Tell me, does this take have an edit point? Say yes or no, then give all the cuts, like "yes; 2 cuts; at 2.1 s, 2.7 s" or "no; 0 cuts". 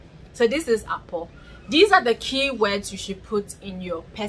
no; 0 cuts